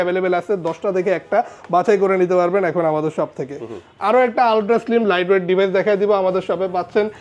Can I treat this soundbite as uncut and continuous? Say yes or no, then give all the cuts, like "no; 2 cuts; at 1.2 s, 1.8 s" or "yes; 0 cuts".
yes; 0 cuts